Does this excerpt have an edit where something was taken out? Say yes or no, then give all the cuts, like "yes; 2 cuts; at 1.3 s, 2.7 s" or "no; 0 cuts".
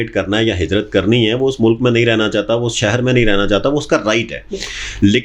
no; 0 cuts